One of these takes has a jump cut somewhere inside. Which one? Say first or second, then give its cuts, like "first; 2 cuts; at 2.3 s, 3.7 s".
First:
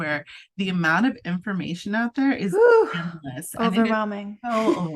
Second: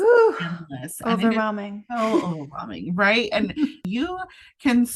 second; 1 cut; at 3.9 s